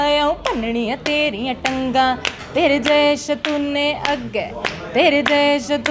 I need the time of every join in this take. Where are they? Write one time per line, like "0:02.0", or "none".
none

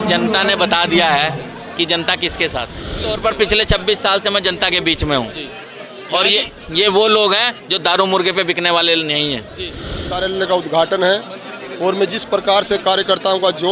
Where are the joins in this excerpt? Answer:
0:03.0
0:10.1

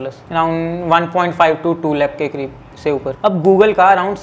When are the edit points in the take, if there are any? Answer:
0:03.1

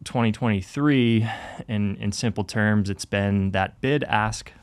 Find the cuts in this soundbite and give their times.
none

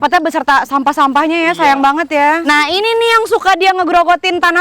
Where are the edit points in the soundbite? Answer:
none

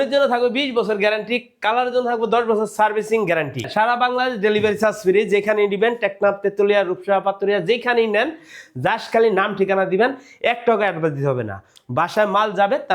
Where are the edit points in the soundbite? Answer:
0:03.7

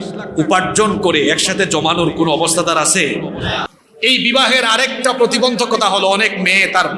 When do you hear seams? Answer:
0:03.8

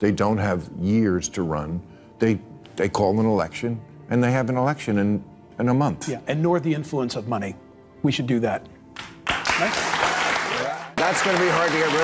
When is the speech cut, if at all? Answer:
0:10.9

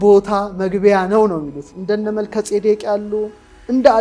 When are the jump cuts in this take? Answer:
0:01.7

